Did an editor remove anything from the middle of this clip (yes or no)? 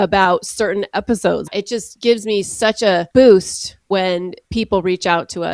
yes